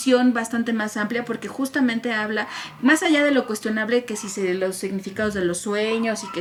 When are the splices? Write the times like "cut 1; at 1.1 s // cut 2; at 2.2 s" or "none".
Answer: none